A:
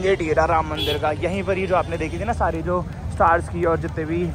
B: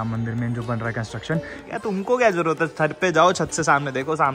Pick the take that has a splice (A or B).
B